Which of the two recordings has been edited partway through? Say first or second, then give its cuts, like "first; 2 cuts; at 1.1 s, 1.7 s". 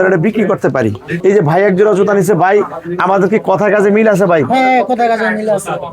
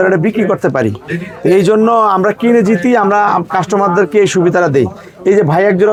first; 1 cut; at 1.0 s